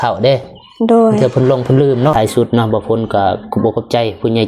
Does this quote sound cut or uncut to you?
cut